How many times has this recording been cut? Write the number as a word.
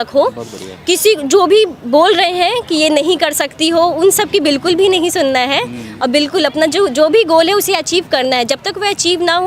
zero